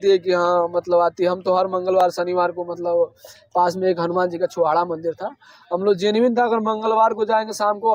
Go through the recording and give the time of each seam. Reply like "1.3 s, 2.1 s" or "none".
none